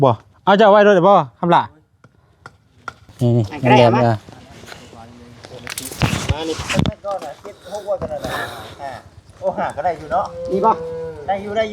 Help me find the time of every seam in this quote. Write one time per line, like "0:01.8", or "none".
0:03.0